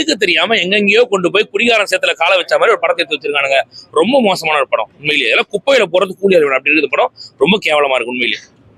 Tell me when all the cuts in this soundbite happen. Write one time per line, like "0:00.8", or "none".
none